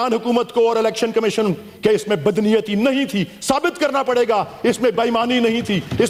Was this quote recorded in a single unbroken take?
yes; 0 cuts

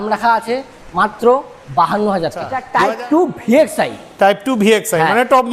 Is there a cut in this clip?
yes; 1 cut; at 2.6 s

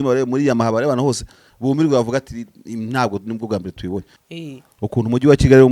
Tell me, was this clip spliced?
yes; 1 cut; at 4.2 s

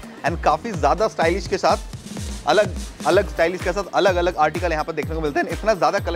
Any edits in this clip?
no; 0 cuts

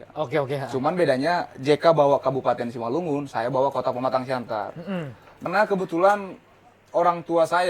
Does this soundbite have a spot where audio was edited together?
yes; 1 cut; at 5.4 s

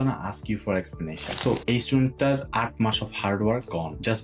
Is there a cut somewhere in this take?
yes; 1 cut; at 1.3 s

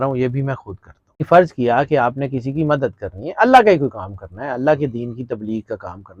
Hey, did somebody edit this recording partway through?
yes; 1 cut; at 1.2 s

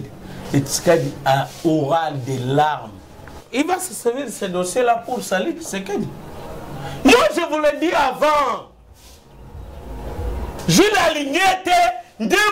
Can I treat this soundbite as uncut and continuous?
no; 2 cuts; at 3.4 s, 10.6 s

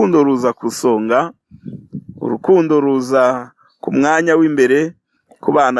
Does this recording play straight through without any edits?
yes; 0 cuts

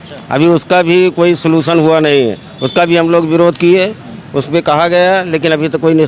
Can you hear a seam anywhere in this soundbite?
no; 0 cuts

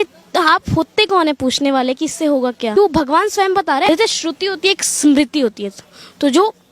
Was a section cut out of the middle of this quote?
yes; 2 cuts; at 2.7 s, 3.9 s

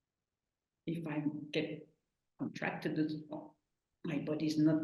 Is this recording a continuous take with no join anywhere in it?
yes; 0 cuts

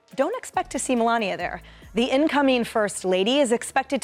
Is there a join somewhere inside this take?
no; 0 cuts

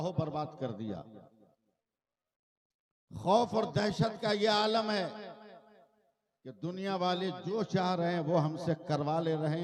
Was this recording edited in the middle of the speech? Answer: no; 0 cuts

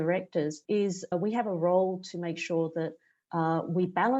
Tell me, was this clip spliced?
yes; 1 cut; at 1.0 s

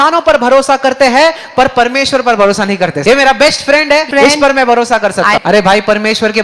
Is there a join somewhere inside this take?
yes; 3 cuts; at 3.0 s, 4.1 s, 5.4 s

